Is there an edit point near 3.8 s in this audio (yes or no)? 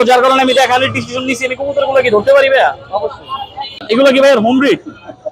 yes